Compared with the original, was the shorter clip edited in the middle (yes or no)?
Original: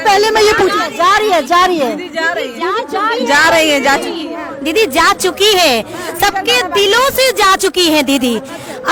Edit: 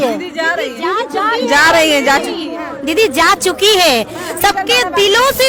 no